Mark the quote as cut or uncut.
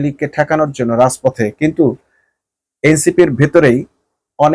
uncut